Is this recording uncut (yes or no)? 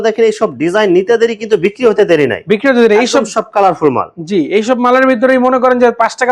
yes